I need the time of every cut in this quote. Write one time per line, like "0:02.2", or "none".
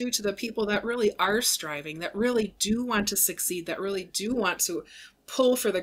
none